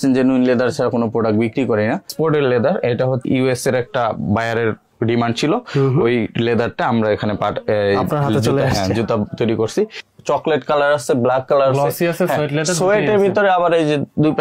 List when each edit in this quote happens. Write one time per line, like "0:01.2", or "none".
0:02.1
0:03.2
0:10.0